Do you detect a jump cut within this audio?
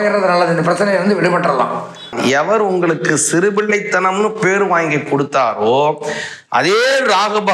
yes; 1 cut; at 2.1 s

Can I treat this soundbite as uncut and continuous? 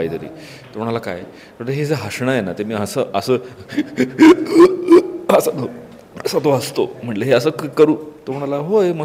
yes; 0 cuts

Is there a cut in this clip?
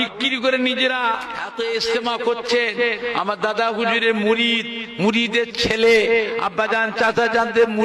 yes; 1 cut; at 1.4 s

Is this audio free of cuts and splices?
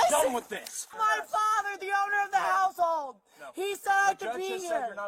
no; 1 cut; at 0.9 s

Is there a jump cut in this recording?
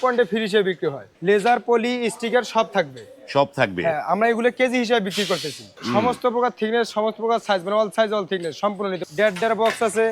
yes; 3 cuts; at 1.1 s, 5.8 s, 9.0 s

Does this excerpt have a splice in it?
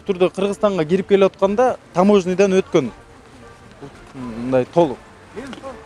no; 0 cuts

